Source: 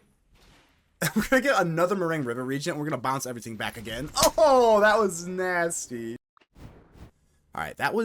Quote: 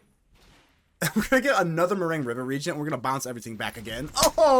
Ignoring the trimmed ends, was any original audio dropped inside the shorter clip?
no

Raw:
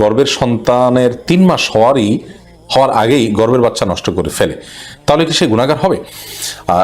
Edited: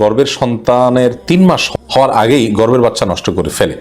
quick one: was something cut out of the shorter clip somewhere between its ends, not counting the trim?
yes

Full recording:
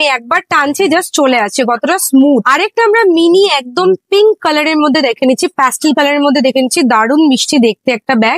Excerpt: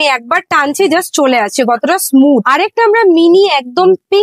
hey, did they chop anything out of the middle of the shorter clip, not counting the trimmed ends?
no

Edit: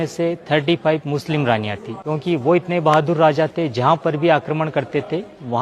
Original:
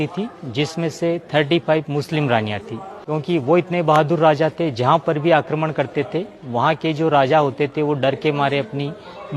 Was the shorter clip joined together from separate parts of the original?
yes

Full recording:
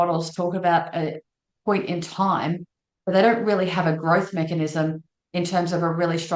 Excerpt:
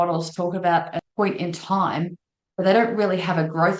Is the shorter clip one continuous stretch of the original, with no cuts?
no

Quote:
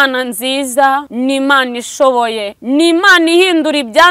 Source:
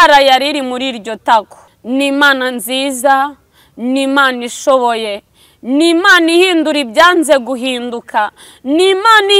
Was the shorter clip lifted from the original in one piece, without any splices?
no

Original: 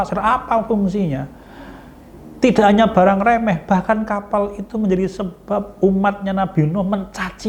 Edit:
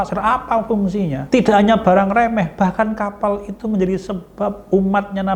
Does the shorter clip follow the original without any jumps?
no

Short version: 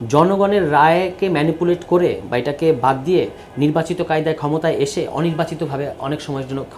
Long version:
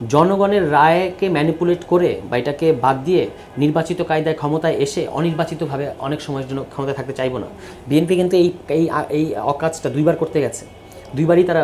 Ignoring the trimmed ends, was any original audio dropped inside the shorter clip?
no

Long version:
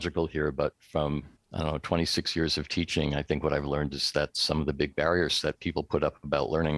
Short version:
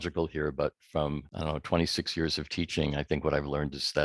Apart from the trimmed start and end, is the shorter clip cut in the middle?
yes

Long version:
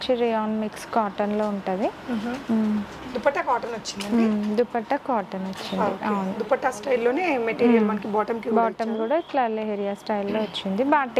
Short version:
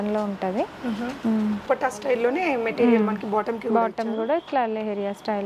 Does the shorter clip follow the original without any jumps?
no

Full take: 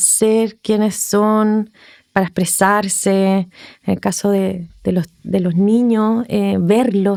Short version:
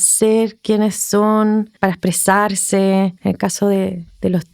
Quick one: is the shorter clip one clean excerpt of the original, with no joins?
no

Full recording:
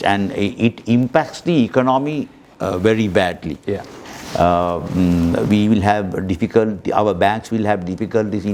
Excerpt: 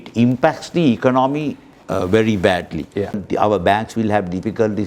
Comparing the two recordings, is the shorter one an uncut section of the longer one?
no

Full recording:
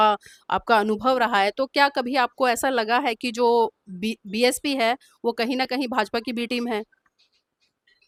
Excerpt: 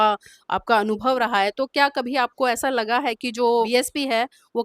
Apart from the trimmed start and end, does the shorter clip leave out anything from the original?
yes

